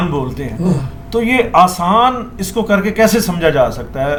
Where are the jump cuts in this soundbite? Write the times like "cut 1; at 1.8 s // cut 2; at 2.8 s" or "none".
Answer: none